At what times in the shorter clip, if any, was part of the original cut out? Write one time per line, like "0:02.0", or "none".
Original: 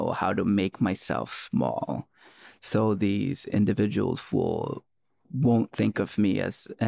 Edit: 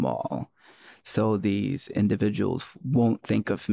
0:02.6